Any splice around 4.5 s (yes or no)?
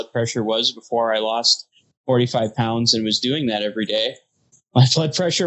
yes